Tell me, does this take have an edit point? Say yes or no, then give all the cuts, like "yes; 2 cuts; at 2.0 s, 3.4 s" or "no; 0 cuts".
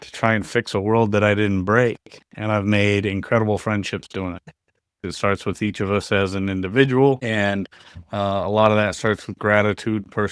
yes; 1 cut; at 5.1 s